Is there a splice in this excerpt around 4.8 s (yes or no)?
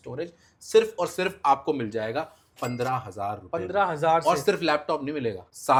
no